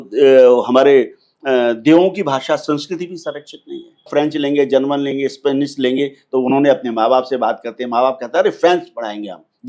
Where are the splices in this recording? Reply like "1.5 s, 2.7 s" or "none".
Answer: 4.1 s